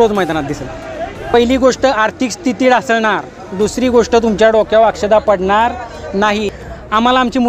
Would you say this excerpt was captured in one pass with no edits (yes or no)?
no